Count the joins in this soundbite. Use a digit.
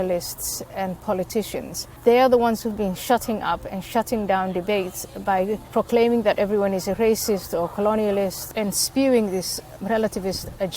4